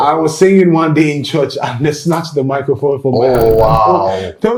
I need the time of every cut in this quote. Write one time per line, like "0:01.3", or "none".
none